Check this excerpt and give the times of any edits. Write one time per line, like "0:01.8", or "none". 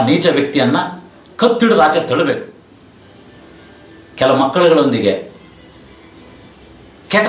0:02.6